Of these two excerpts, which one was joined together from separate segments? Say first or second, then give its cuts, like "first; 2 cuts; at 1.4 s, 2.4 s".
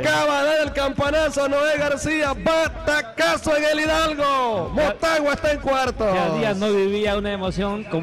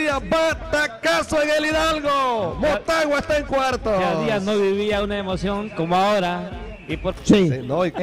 second; 1 cut; at 7.1 s